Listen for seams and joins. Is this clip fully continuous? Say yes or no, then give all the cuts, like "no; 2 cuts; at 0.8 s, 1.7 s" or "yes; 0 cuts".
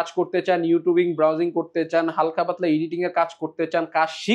yes; 0 cuts